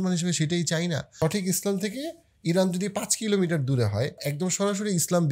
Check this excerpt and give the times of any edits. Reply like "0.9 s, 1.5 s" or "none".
1.0 s, 4.3 s